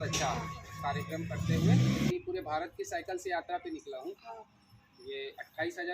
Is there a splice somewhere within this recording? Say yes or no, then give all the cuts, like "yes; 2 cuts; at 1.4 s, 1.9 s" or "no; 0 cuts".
yes; 1 cut; at 2.1 s